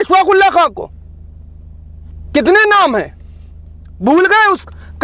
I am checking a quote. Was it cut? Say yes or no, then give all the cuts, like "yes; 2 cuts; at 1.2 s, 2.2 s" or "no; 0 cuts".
no; 0 cuts